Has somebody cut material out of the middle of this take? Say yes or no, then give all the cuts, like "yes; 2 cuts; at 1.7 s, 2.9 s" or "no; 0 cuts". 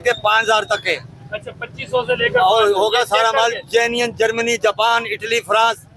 no; 0 cuts